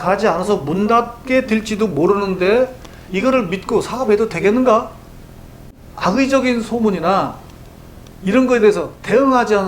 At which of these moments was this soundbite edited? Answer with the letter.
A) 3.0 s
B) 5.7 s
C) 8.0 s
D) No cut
B